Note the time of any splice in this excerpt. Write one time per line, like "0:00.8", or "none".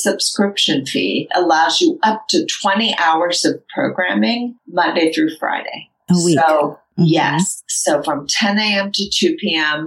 0:04.6